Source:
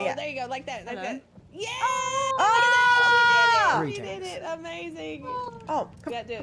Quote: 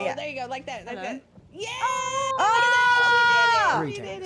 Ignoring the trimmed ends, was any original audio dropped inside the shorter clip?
no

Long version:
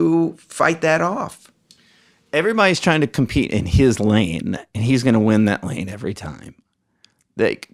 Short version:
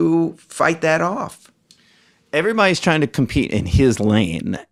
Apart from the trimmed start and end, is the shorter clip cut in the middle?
no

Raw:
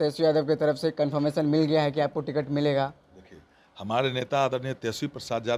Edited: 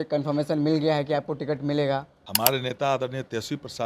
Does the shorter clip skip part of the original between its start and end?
yes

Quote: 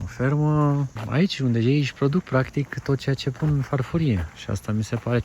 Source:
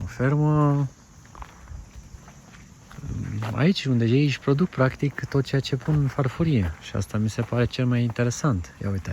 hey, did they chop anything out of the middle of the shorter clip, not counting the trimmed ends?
yes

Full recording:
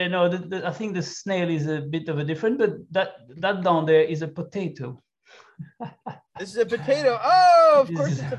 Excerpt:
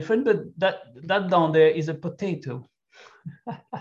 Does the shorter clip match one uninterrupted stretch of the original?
yes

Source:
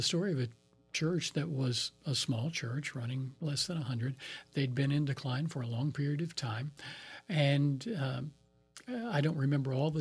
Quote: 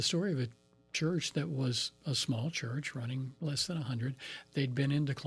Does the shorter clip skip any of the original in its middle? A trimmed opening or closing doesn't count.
no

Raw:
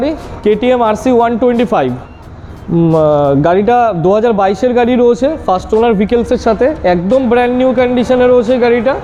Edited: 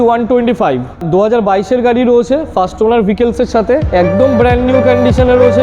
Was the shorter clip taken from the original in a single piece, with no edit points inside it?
no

